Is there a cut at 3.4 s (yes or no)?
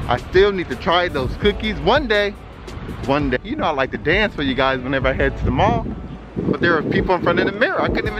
yes